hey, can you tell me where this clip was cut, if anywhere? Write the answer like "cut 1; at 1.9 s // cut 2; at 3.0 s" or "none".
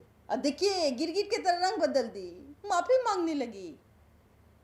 none

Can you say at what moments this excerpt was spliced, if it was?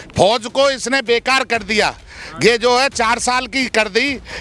none

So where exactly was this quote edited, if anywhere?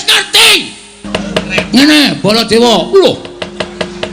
cut 1; at 1.0 s

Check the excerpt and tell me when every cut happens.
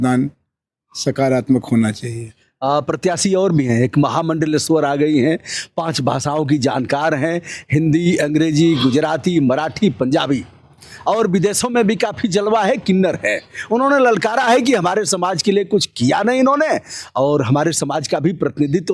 none

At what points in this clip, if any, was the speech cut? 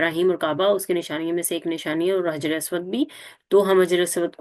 none

